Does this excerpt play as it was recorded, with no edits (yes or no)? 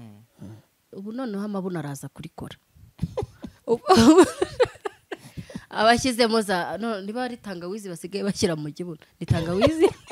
no